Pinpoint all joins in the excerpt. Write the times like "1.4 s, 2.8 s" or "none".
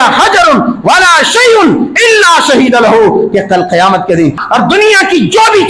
4.4 s